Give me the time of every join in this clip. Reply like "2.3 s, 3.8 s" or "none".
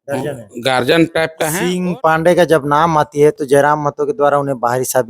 1.1 s